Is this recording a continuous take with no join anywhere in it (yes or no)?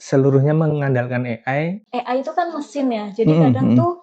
no